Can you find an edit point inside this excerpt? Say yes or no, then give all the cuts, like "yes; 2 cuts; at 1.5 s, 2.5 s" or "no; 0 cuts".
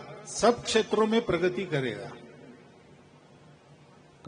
no; 0 cuts